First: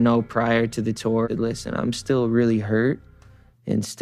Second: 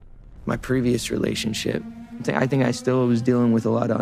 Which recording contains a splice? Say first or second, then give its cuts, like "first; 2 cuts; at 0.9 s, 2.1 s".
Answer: first; 1 cut; at 1.3 s